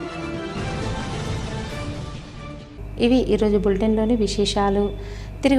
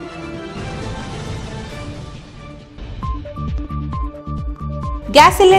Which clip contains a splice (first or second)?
second